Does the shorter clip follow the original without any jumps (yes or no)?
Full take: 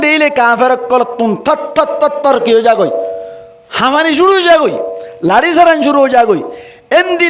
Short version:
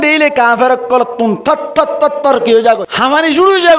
no